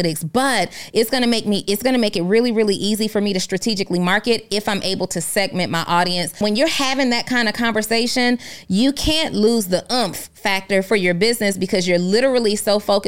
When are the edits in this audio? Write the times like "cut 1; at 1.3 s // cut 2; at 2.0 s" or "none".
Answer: cut 1; at 6.4 s